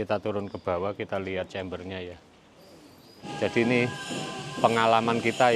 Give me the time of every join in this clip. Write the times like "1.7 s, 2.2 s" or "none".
3.3 s